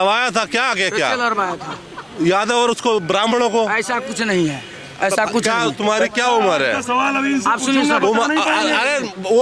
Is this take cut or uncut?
uncut